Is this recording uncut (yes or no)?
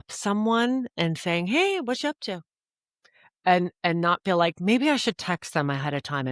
yes